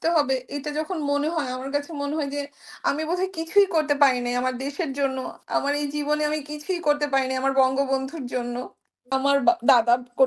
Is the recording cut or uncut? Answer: cut